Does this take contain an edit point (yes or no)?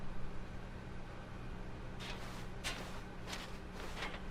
no